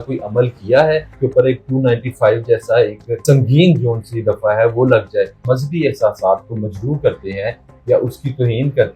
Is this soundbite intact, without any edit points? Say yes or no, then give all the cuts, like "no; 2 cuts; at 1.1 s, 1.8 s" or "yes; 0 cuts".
no; 3 cuts; at 1.1 s, 3.2 s, 5.4 s